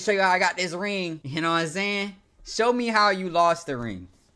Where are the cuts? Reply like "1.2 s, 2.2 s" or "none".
1.2 s